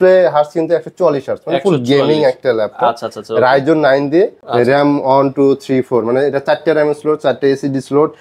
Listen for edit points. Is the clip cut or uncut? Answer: cut